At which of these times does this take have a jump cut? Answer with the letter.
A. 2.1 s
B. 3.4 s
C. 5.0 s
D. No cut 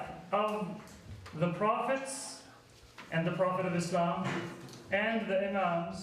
A